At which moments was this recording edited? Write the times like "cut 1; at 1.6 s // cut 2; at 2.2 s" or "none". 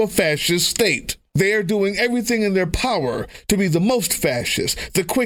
none

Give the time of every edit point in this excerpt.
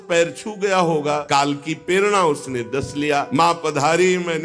cut 1; at 1.2 s // cut 2; at 3.3 s

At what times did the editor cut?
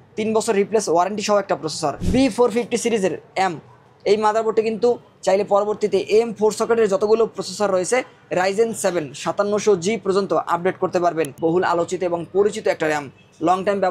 cut 1; at 2.0 s // cut 2; at 11.3 s

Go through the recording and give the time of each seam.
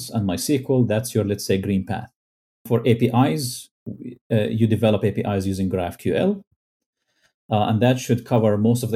cut 1; at 2.7 s

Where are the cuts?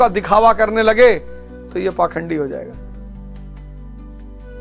cut 1; at 2.7 s

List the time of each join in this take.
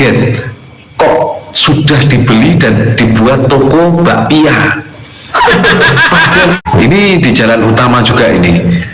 cut 1; at 6.6 s

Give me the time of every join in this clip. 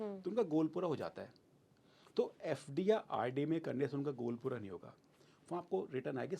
none

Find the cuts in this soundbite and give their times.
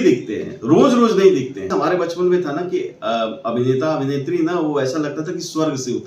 cut 1; at 1.7 s

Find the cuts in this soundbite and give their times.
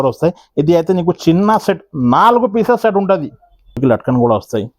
cut 1; at 3.8 s

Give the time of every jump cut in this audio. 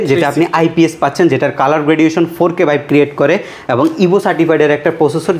none

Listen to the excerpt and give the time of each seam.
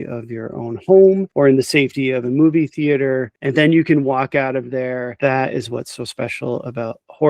cut 1; at 3.3 s // cut 2; at 5.1 s

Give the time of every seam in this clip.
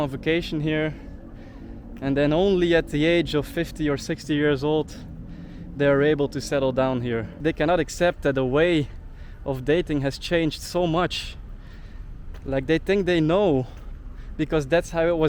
cut 1; at 7.3 s

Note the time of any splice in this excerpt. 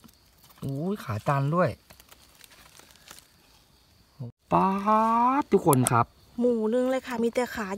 cut 1; at 4.3 s

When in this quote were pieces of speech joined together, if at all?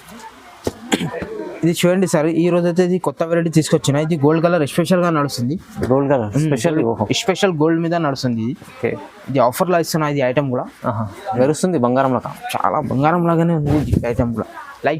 cut 1; at 1.2 s

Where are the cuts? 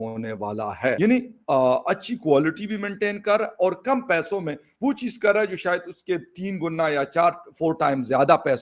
cut 1; at 1.0 s

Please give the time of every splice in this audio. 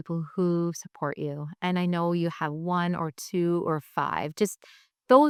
none

